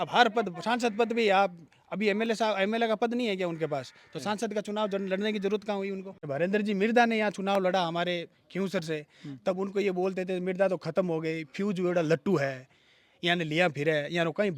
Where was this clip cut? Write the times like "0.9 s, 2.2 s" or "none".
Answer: 6.1 s